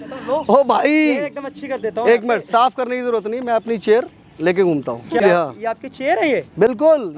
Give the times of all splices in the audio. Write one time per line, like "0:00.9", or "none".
0:05.2